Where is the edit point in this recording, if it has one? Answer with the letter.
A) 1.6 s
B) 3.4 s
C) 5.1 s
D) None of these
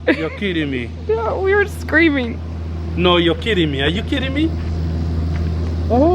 D